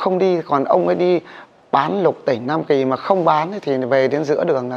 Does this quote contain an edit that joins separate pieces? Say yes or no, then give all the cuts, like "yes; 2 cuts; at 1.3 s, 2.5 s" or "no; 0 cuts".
no; 0 cuts